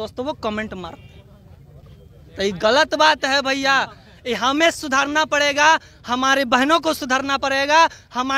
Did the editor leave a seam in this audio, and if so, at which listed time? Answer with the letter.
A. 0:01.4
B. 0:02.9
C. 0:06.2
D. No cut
D